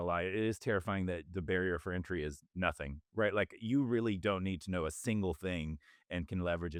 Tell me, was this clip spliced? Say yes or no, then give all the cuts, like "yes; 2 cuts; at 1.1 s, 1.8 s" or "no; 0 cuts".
no; 0 cuts